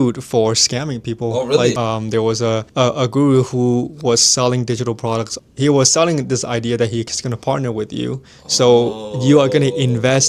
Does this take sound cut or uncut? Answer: cut